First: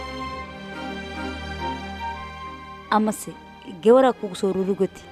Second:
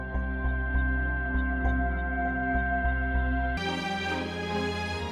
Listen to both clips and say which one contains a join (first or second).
second